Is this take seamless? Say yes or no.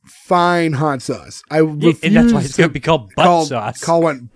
yes